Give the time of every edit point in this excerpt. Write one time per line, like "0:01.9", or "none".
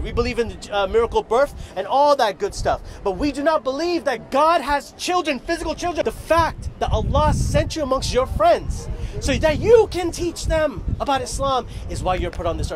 0:06.0

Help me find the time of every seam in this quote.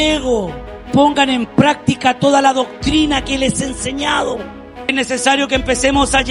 0:00.9
0:04.9

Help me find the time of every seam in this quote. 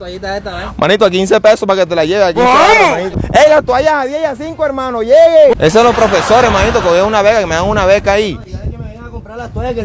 0:03.1
0:05.5

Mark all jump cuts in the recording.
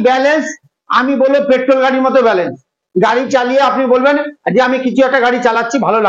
0:02.8

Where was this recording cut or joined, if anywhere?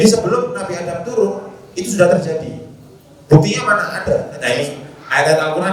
0:04.3

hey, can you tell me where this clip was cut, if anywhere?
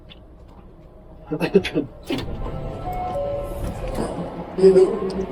none

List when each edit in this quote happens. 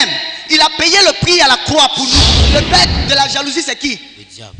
0:02.5

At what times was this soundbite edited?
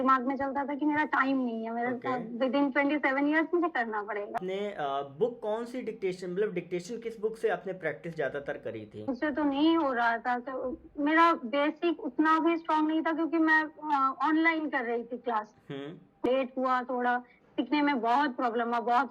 0:04.4
0:09.1
0:16.3

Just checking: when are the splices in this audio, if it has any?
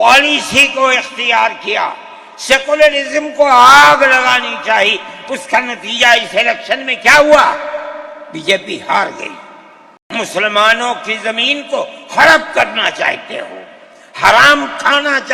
0:10.0

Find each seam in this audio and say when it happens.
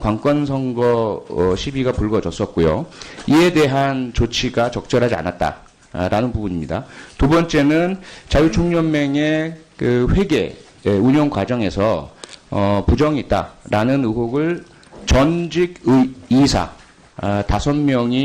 0:12.9

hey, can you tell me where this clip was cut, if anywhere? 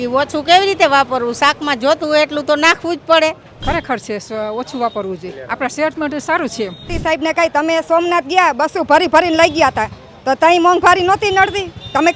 0:03.5
0:06.9

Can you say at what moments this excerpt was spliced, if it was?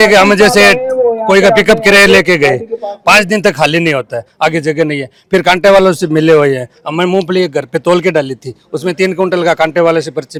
none

